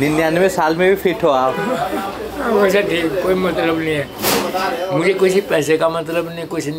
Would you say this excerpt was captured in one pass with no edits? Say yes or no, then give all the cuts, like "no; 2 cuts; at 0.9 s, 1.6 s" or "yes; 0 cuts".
yes; 0 cuts